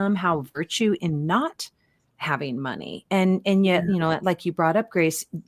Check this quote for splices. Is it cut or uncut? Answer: uncut